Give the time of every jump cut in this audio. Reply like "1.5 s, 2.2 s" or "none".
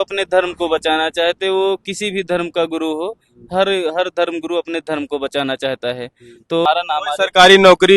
6.7 s